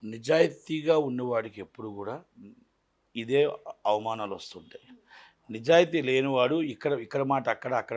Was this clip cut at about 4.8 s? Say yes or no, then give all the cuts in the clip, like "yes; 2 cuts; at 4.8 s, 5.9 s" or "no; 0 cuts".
no; 0 cuts